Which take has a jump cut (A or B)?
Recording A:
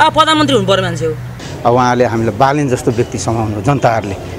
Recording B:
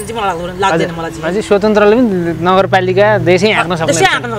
A